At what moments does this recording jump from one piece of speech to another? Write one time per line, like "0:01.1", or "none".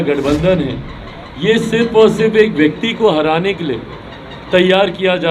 none